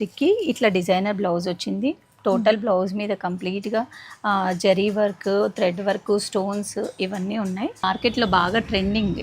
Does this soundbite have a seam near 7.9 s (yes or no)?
yes